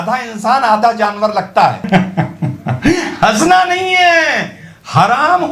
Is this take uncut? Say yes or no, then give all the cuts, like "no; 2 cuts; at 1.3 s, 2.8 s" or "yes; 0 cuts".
no; 1 cut; at 1.9 s